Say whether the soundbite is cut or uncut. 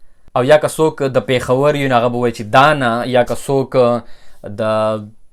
uncut